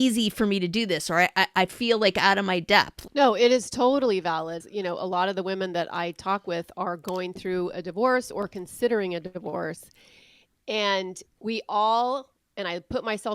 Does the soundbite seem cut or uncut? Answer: cut